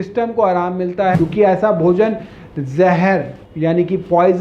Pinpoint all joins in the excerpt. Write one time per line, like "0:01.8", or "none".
0:01.1

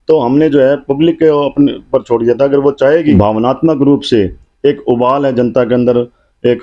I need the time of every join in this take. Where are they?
0:03.2

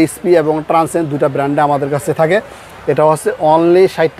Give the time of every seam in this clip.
none

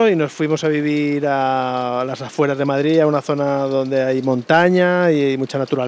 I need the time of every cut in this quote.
none

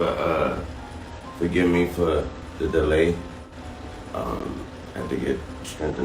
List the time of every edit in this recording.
0:04.8

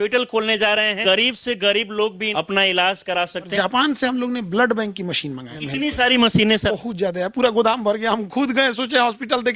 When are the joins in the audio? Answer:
0:01.0
0:02.2
0:03.5
0:05.5
0:06.7

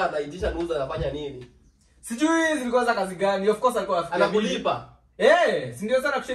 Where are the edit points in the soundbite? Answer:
none

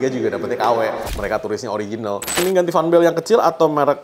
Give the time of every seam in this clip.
0:02.4

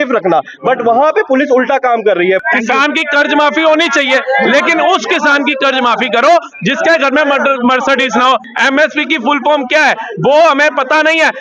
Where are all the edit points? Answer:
0:02.4
0:08.5

